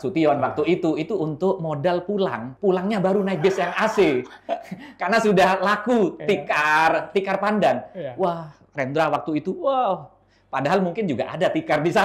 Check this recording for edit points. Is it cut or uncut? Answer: cut